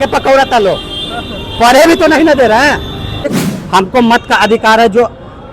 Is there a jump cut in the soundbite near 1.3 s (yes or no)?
no